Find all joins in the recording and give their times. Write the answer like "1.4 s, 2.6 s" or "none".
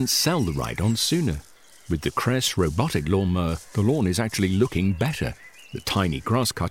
none